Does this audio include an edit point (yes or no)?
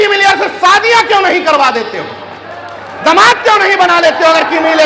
no